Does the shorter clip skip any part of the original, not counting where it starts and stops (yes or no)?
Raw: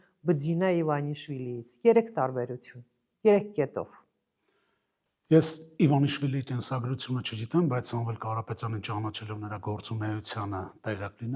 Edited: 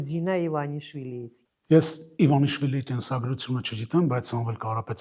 yes